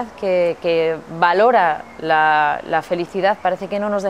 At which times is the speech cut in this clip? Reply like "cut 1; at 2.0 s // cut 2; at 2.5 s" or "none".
none